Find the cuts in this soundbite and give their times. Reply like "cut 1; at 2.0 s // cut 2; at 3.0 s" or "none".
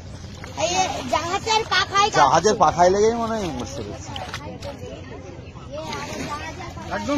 none